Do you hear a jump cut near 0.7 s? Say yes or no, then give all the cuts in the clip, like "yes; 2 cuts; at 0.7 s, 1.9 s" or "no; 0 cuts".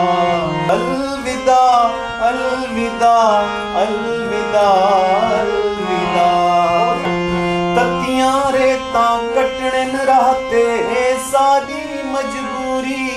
yes; 2 cuts; at 0.7 s, 7.1 s